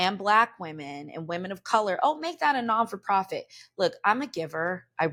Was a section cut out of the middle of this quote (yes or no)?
no